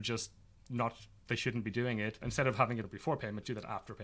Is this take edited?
yes; 2 cuts; at 2.3 s, 2.9 s

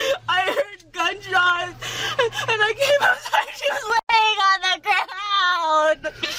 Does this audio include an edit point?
no; 0 cuts

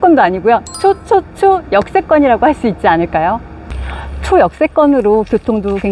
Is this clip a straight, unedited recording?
no; 1 cut; at 4.0 s

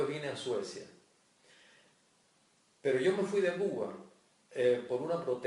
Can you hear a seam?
yes; 1 cut; at 3.5 s

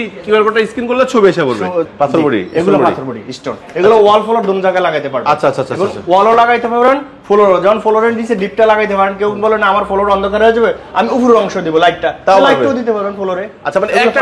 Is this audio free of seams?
no; 1 cut; at 1.9 s

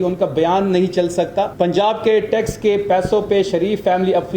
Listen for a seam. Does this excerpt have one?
yes; 1 cut; at 1.5 s

